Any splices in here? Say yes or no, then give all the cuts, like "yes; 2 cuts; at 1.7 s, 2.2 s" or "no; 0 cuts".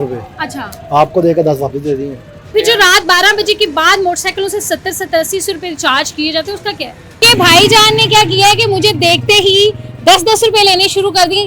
yes; 2 cuts; at 2.5 s, 7.2 s